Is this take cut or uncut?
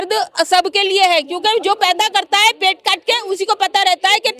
uncut